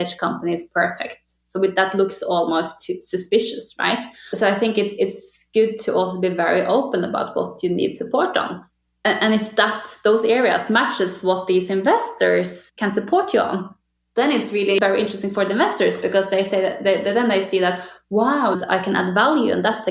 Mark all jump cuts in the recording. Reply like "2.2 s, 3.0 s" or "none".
4.2 s, 8.6 s, 12.6 s, 14.8 s, 18.6 s